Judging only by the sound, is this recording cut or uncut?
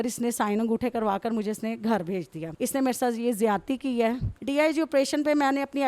cut